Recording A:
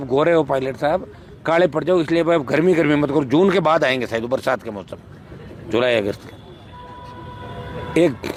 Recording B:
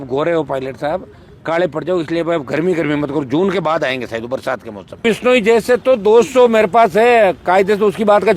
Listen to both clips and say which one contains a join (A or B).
B